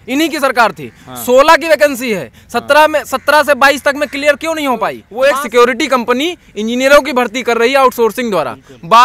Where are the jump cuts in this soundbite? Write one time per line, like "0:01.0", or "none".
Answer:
0:05.0